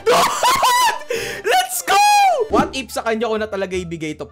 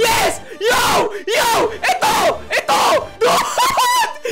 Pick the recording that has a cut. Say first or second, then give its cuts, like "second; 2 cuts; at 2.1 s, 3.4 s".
first; 1 cut; at 2.5 s